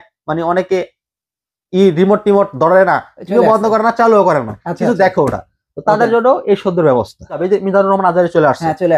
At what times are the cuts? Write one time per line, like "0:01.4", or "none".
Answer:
0:07.4

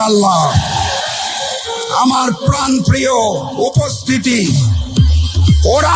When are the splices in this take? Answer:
none

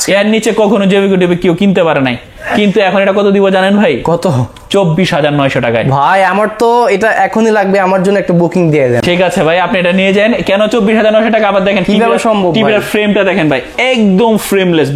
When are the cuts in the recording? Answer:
none

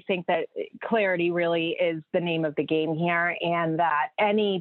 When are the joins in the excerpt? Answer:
none

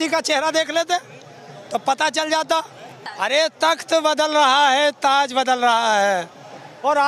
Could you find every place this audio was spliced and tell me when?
0:03.1

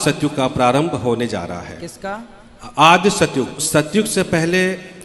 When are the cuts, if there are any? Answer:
0:03.6

